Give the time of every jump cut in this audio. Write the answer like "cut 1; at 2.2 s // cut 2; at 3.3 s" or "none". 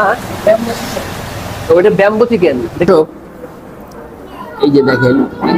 cut 1; at 2.8 s